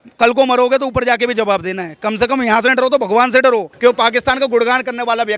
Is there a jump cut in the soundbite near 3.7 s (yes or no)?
yes